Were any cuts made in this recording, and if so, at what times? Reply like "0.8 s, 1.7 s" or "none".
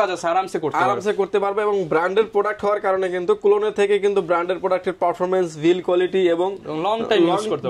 none